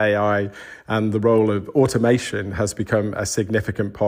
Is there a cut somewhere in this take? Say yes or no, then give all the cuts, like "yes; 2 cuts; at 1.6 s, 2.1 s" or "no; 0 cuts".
no; 0 cuts